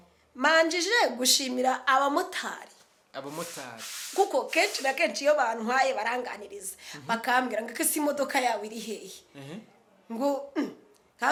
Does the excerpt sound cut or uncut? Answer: uncut